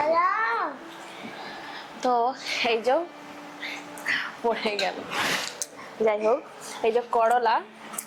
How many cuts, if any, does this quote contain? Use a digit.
0